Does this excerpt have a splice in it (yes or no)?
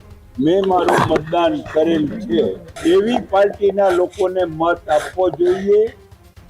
yes